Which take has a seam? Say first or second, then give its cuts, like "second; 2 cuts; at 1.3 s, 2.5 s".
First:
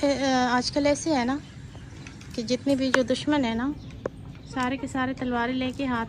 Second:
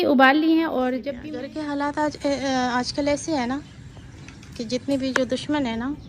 second; 1 cut; at 1.1 s